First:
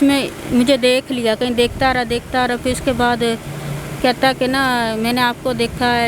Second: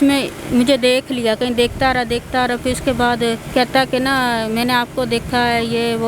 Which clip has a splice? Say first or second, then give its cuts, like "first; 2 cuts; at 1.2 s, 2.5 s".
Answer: second; 1 cut; at 3.4 s